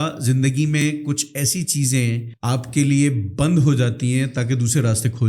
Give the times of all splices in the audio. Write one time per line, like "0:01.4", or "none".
0:02.3